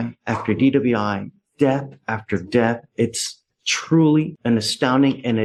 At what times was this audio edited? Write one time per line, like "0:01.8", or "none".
none